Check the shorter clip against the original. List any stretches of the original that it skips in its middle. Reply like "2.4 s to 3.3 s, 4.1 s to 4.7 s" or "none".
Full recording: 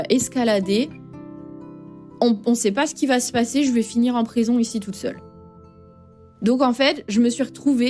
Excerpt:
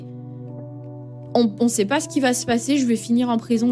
none